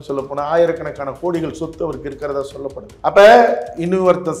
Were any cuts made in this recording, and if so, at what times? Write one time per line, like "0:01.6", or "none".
0:02.9